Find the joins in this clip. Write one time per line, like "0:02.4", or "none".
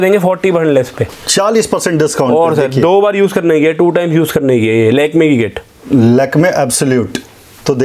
none